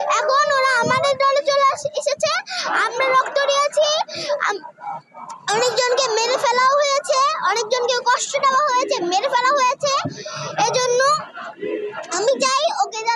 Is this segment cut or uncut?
uncut